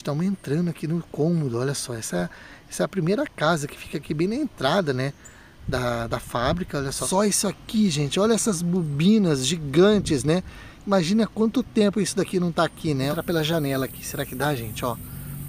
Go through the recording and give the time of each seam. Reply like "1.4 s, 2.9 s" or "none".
7.0 s, 13.1 s